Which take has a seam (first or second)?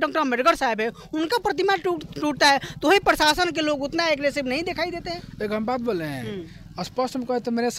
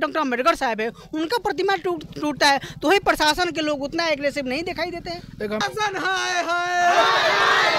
second